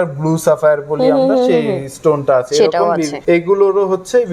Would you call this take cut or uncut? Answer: cut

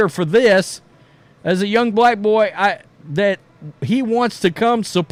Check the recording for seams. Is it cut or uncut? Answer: uncut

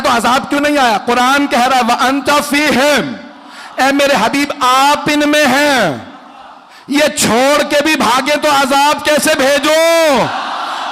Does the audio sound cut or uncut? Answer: uncut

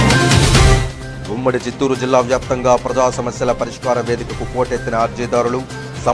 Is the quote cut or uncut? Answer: uncut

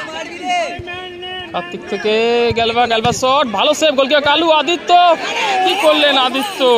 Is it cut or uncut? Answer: uncut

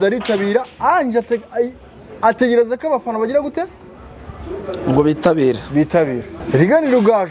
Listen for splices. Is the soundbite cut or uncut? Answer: cut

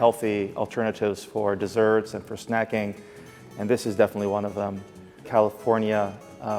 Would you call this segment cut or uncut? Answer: cut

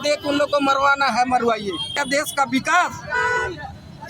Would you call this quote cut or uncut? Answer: cut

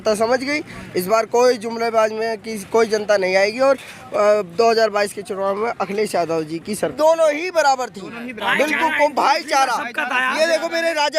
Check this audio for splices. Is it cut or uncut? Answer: cut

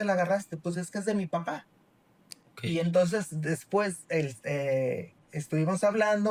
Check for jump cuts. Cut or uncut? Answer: uncut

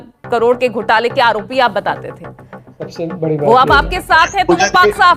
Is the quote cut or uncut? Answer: uncut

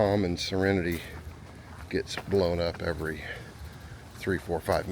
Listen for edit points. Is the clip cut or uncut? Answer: uncut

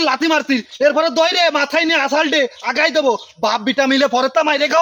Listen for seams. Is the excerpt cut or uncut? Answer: uncut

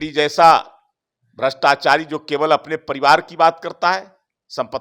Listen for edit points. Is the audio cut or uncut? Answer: uncut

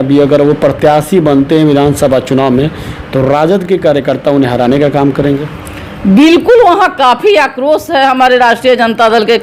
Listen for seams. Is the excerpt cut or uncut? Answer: uncut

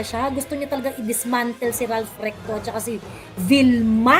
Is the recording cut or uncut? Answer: uncut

